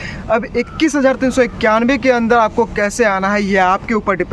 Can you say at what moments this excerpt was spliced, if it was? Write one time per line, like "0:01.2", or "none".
none